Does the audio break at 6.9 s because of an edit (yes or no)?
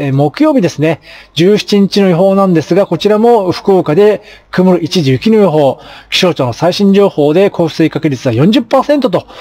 no